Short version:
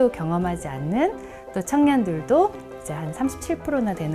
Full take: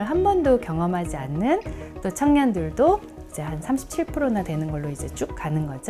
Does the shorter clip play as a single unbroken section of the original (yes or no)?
yes